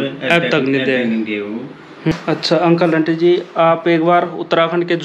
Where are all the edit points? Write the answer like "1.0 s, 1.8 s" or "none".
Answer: 2.1 s